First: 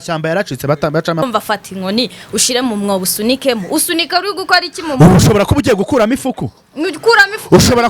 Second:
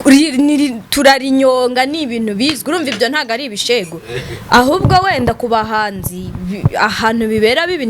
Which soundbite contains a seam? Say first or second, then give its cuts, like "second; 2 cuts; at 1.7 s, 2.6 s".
first; 1 cut; at 1.2 s